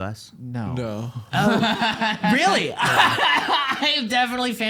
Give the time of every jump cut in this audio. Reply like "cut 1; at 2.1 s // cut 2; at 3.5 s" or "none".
none